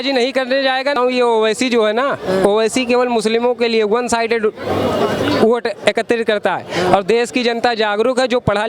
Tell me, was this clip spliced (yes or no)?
yes